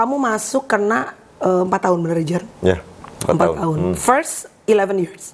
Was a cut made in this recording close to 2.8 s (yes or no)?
no